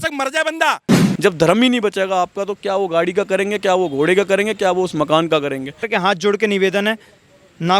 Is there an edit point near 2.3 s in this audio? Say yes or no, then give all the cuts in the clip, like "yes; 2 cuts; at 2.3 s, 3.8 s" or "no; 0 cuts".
no; 2 cuts; at 1.0 s, 5.8 s